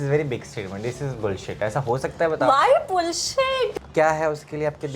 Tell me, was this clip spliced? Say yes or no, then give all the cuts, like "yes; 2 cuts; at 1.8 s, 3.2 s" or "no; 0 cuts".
yes; 1 cut; at 3.7 s